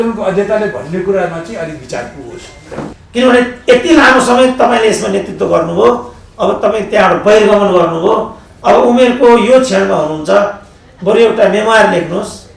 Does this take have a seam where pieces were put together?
yes; 1 cut; at 3.0 s

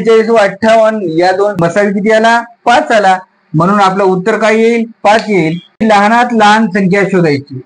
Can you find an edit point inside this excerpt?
yes; 2 cuts; at 1.6 s, 5.8 s

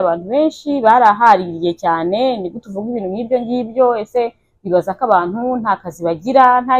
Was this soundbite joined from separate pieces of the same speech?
no; 0 cuts

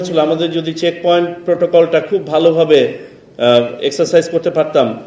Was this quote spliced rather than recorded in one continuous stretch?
no; 0 cuts

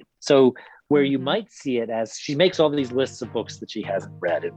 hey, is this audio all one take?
yes; 0 cuts

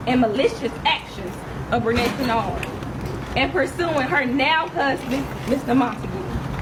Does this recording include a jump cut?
no; 0 cuts

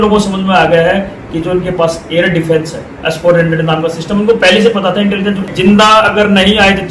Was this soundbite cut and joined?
yes; 1 cut; at 5.5 s

